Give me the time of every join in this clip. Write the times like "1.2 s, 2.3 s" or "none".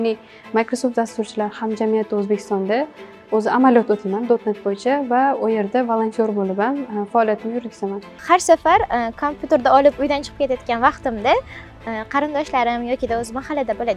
8.2 s